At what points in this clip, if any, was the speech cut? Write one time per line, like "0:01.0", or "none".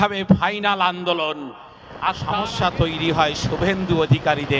0:02.2